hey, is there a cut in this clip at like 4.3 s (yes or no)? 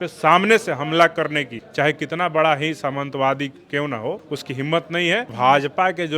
yes